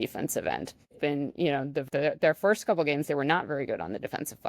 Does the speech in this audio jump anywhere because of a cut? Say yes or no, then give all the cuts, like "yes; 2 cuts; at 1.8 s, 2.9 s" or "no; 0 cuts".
yes; 2 cuts; at 0.9 s, 1.9 s